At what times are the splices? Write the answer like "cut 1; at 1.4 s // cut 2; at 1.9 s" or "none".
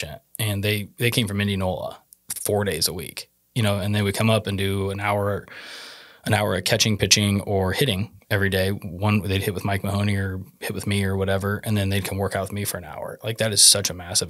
none